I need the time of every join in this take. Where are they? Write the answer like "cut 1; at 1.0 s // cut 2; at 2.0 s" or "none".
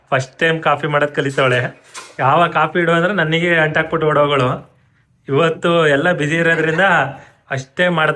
none

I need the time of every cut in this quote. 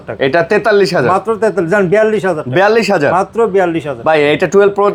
none

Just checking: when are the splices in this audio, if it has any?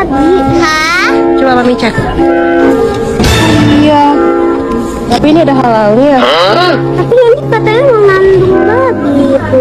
cut 1; at 2.7 s // cut 2; at 5.1 s

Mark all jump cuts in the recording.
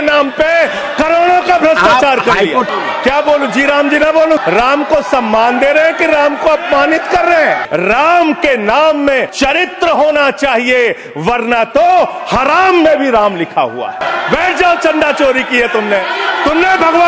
cut 1; at 2.7 s // cut 2; at 4.4 s // cut 3; at 7.6 s // cut 4; at 9.3 s // cut 5; at 14.0 s

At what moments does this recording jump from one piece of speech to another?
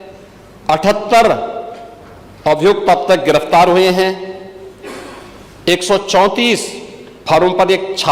none

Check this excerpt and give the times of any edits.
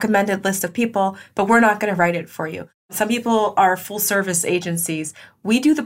cut 1; at 2.9 s

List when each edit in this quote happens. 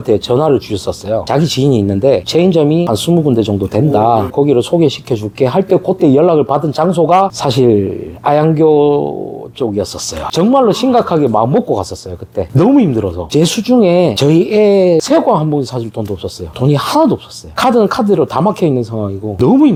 none

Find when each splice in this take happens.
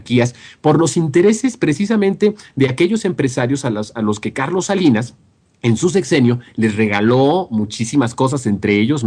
none

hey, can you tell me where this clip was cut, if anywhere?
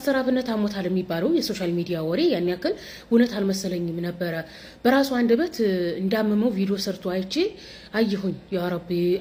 none

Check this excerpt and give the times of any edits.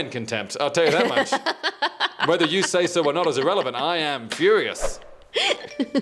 none

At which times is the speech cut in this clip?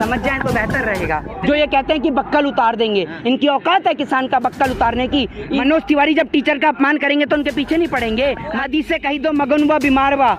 cut 1; at 1.3 s // cut 2; at 5.6 s // cut 3; at 8.6 s

